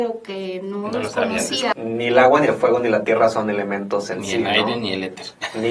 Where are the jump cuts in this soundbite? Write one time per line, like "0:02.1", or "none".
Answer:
0:01.7